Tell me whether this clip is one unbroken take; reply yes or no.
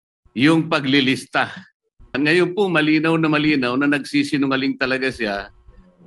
no